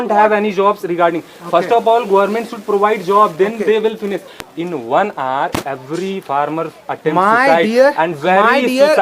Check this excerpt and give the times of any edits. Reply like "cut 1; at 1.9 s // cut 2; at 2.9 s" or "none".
cut 1; at 4.4 s